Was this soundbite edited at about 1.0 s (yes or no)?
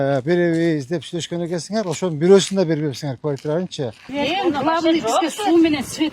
no